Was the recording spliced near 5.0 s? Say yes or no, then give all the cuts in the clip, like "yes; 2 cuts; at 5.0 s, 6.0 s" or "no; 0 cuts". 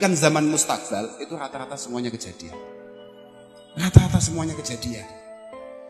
yes; 1 cut; at 5.0 s